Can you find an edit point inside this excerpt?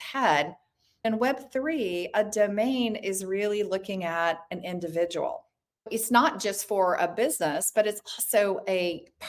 yes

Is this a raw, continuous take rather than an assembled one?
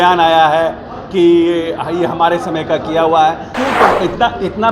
no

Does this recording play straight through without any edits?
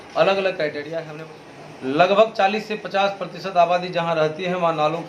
no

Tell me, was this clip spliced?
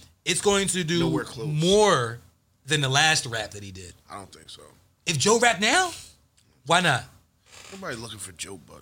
no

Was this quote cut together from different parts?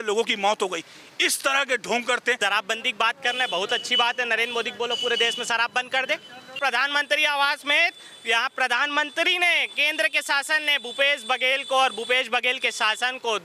yes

